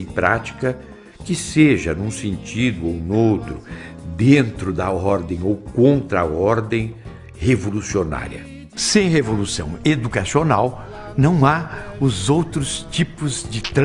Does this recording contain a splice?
yes; 1 cut; at 3.0 s

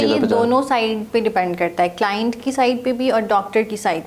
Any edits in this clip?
no; 0 cuts

